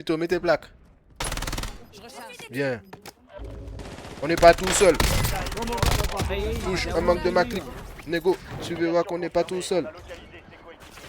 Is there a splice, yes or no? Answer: yes